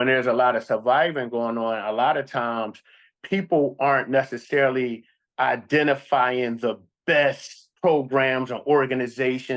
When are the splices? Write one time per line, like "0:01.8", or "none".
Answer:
none